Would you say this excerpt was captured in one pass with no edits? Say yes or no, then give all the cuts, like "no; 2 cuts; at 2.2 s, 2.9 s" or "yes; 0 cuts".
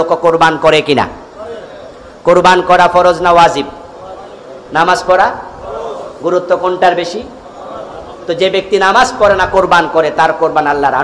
yes; 0 cuts